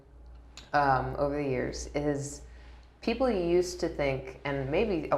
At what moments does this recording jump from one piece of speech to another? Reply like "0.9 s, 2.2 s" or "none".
none